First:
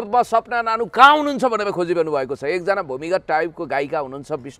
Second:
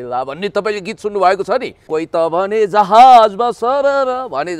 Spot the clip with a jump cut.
second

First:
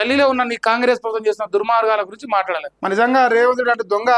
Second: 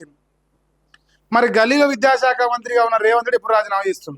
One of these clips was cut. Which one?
first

